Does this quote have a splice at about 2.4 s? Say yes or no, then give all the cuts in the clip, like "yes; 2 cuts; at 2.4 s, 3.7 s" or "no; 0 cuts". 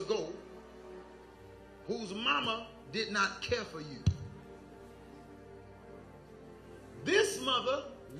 yes; 1 cut; at 2.4 s